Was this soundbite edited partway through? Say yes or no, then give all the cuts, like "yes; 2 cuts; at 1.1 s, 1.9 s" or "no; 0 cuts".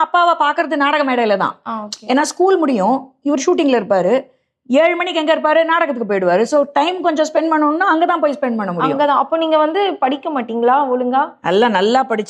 no; 0 cuts